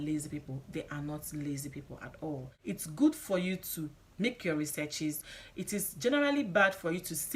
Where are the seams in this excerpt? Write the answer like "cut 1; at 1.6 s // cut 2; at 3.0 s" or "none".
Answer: cut 1; at 2.5 s